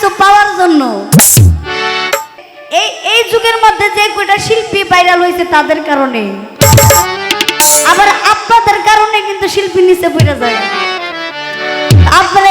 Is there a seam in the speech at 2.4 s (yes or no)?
yes